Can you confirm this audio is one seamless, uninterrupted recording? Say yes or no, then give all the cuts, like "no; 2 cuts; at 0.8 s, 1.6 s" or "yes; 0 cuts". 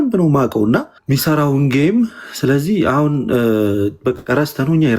no; 1 cut; at 0.9 s